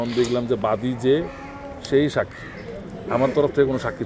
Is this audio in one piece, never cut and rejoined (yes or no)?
yes